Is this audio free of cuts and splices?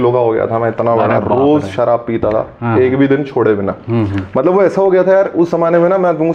yes; 0 cuts

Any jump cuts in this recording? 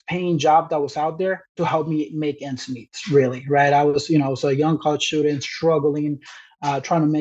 no; 0 cuts

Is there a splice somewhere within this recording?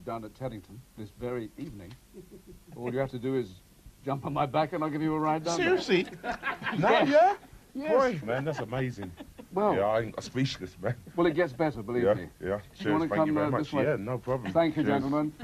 yes; 1 cut; at 1.6 s

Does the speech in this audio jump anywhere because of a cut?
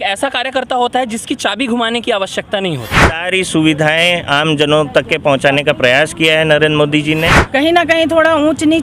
yes; 2 cuts; at 3.2 s, 7.4 s

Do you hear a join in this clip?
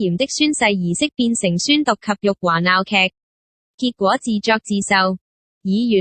yes; 1 cut; at 1.1 s

